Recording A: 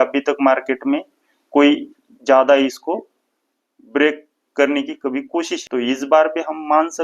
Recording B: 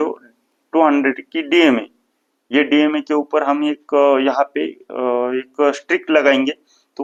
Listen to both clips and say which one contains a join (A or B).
A